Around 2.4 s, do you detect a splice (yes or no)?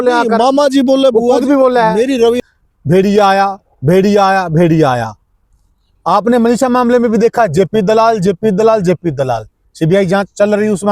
yes